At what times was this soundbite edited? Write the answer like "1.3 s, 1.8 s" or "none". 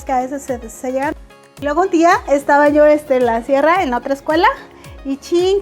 1.1 s